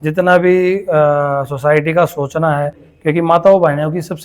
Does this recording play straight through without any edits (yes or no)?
no